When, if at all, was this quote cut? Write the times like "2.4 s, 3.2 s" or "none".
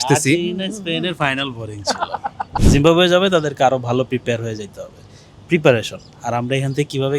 2.5 s